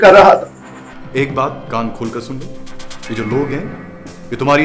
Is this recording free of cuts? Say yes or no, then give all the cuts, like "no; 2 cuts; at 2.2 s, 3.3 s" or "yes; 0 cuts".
no; 1 cut; at 0.9 s